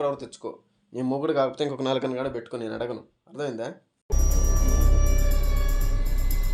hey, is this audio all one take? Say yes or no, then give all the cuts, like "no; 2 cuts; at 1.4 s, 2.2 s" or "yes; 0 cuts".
yes; 0 cuts